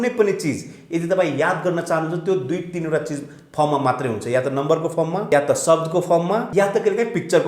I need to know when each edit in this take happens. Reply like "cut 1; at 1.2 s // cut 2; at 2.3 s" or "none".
cut 1; at 5.2 s // cut 2; at 6.5 s